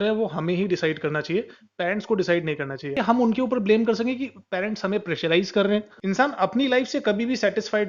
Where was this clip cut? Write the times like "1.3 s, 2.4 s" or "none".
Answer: 3.0 s, 5.9 s